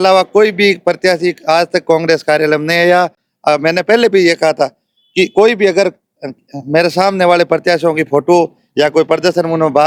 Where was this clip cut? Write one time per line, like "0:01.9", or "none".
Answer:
none

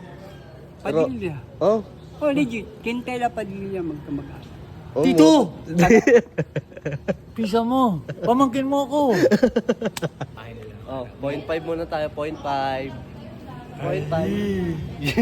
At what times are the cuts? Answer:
0:10.4

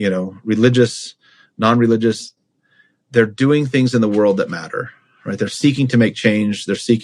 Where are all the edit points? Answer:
none

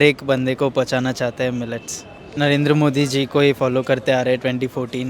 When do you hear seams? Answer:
0:02.3

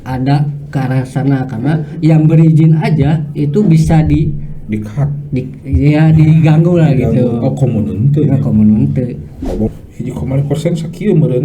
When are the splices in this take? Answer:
0:09.7

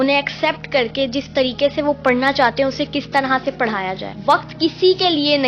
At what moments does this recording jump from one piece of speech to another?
0:04.1

